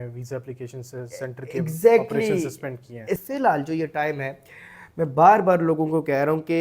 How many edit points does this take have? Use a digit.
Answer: 1